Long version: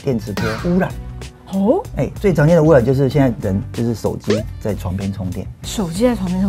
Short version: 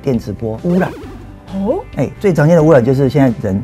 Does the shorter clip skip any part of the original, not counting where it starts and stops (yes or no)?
no